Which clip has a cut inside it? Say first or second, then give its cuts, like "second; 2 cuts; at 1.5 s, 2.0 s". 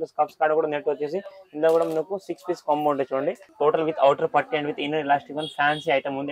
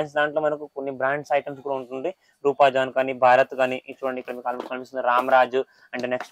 first; 1 cut; at 3.5 s